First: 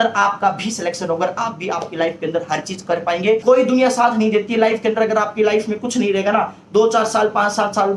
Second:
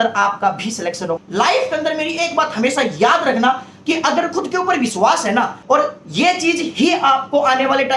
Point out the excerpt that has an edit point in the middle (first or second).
second